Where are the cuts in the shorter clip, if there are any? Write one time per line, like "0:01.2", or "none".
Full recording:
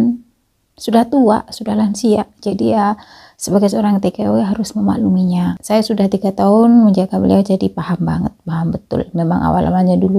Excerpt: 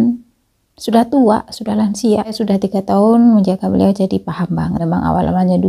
0:02.4
0:04.8

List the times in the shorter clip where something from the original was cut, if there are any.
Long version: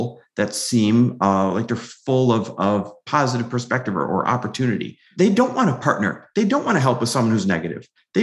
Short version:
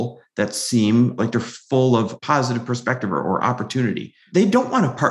0:01.2
0:02.1

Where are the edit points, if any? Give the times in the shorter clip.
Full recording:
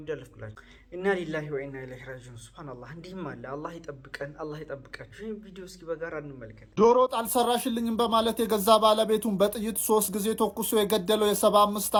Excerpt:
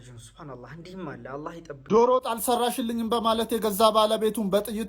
0:01.8

